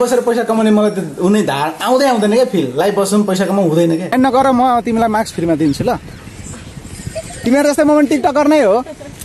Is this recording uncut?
no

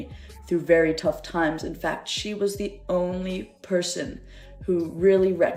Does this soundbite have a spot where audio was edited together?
no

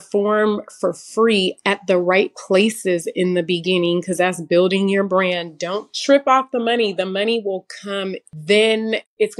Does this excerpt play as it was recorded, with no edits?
no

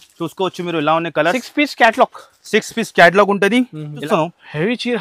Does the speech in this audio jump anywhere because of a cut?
yes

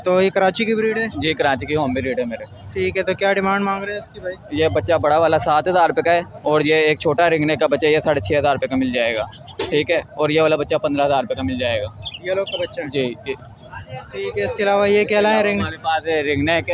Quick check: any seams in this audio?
no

